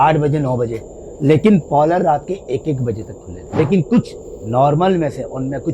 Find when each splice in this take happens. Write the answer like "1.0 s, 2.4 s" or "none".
3.4 s